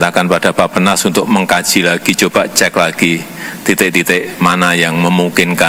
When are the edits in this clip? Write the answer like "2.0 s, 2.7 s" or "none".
none